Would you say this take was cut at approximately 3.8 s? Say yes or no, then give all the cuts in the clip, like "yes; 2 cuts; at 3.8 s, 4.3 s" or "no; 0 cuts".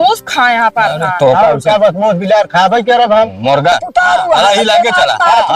yes; 1 cut; at 3.8 s